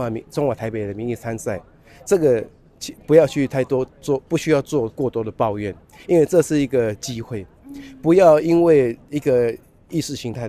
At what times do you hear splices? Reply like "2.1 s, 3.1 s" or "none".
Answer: none